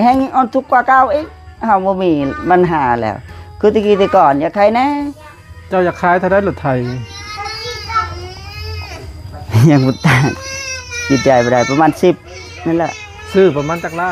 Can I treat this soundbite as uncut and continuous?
yes; 0 cuts

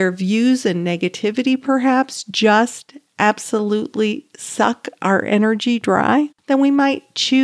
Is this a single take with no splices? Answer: no; 1 cut; at 6.4 s

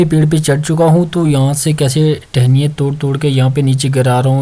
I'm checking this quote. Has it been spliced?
no; 0 cuts

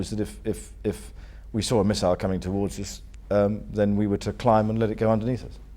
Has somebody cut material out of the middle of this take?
no; 0 cuts

